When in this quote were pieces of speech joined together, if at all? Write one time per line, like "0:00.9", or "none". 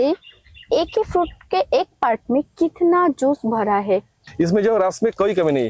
0:04.2